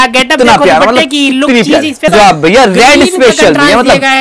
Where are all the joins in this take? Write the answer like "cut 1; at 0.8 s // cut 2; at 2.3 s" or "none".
cut 1; at 2.1 s